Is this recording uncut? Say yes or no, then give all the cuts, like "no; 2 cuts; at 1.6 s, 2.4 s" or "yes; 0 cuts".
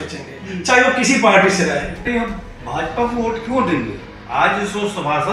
no; 1 cut; at 2.1 s